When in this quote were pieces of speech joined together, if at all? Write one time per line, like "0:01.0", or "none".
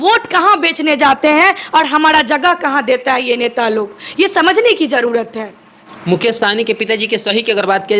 none